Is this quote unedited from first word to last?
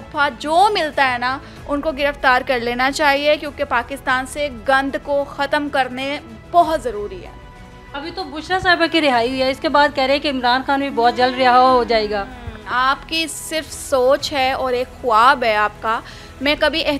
yes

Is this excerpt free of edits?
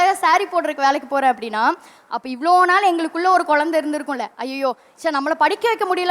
no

